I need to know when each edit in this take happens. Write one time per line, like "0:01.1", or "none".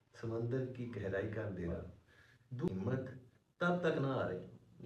0:02.7